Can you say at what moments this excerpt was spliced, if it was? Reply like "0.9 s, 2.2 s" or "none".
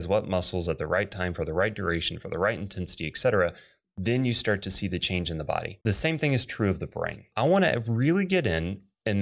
5.7 s, 7.3 s